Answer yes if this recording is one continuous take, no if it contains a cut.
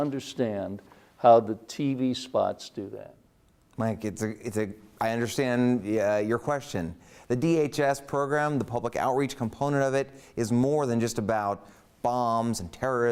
yes